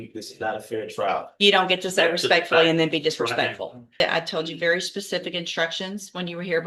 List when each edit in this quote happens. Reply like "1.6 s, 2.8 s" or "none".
4.0 s